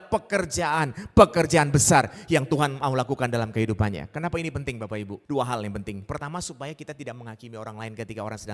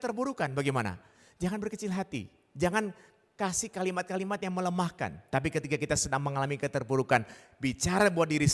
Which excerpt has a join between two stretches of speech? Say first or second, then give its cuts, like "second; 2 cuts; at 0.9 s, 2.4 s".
first; 1 cut; at 5.2 s